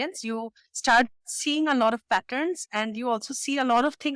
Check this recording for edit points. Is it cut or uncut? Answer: uncut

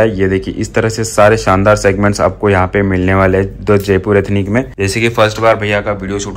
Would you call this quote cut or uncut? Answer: uncut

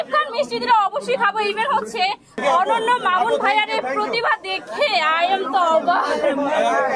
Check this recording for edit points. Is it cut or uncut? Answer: cut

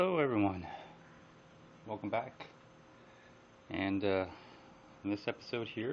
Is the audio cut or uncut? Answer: uncut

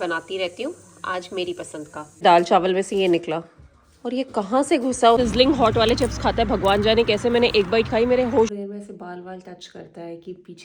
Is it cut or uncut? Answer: cut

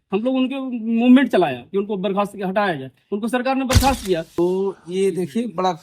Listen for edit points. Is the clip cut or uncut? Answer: cut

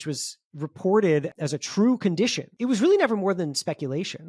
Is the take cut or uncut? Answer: cut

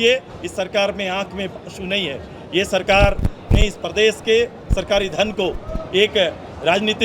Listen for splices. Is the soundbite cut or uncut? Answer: uncut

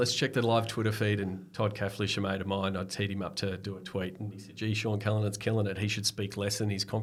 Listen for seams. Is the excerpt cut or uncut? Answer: uncut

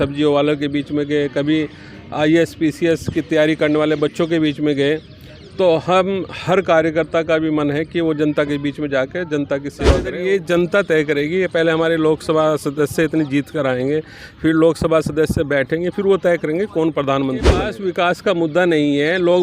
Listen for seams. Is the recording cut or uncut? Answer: cut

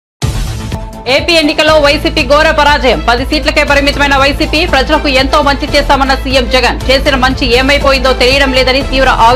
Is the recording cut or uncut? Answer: uncut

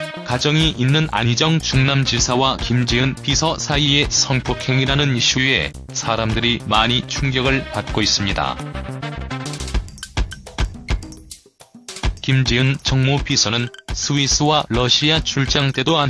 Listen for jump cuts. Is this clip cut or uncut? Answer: cut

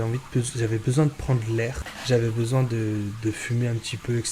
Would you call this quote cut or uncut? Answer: cut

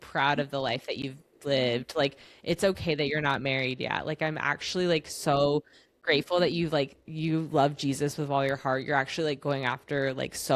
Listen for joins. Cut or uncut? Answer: uncut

